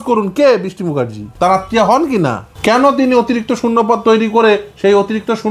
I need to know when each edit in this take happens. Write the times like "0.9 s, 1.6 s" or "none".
1.2 s, 2.5 s